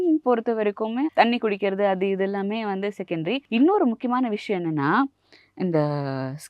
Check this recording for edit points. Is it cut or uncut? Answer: cut